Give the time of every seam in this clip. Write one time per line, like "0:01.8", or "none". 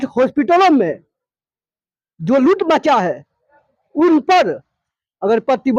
none